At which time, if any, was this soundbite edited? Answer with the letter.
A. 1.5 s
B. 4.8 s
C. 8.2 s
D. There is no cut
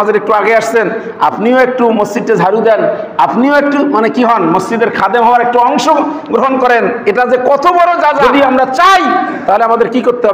C